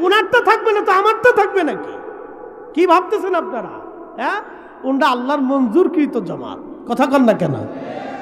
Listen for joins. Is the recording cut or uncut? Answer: uncut